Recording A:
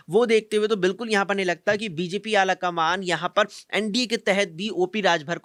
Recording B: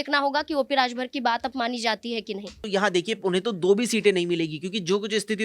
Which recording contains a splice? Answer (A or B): B